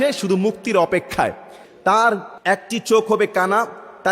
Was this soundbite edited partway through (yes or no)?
yes